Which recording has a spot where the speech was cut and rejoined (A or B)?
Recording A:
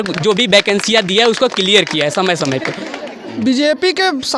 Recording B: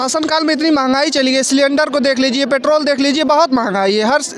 A